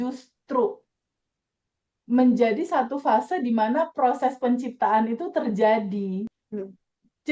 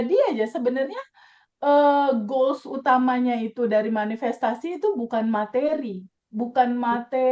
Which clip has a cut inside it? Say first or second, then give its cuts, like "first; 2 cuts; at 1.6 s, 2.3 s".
first; 1 cut; at 6.3 s